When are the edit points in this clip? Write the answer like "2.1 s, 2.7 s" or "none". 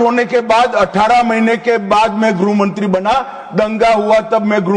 none